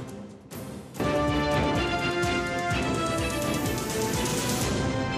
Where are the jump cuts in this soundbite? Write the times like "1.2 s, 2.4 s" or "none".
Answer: 1.0 s

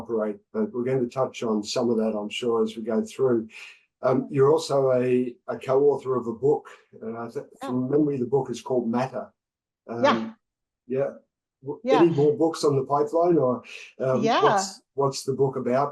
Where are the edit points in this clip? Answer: none

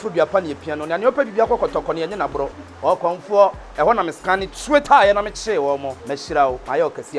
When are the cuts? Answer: none

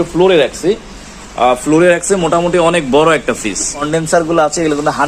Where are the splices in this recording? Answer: 3.9 s

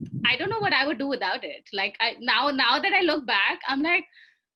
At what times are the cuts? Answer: none

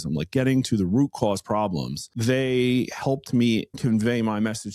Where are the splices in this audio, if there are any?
2.1 s, 3.8 s

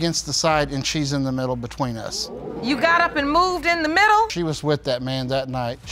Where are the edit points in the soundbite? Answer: none

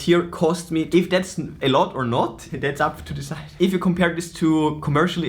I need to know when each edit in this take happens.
0.9 s, 2.5 s

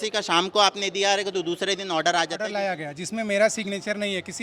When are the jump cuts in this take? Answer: 2.5 s

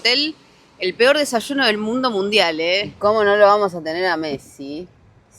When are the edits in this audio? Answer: 2.9 s

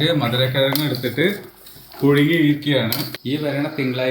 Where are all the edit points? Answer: 3.1 s

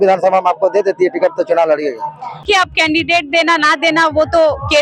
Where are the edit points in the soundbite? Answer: 2.4 s

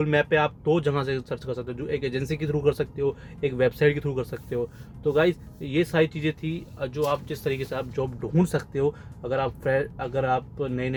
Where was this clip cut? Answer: none

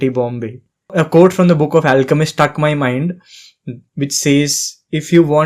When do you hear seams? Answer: 0.9 s

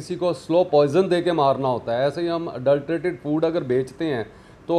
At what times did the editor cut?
none

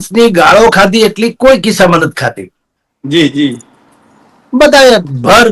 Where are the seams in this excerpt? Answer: none

